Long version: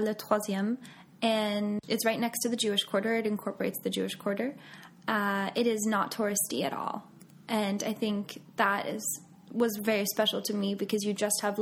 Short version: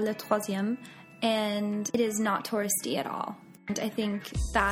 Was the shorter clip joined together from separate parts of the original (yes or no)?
yes